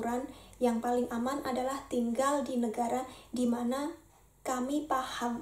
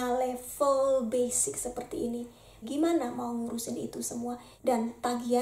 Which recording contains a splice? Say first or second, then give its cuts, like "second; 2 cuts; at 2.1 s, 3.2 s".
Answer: second; 2 cuts; at 2.6 s, 4.5 s